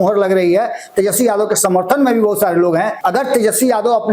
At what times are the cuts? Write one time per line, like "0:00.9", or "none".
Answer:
0:03.0